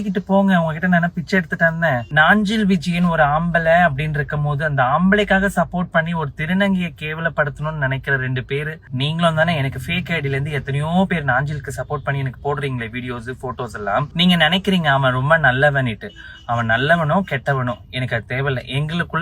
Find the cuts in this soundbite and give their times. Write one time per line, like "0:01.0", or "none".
0:02.1
0:08.8
0:14.1